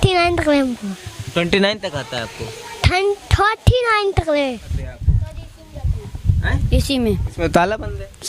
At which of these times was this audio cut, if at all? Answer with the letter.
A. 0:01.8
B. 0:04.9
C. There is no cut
B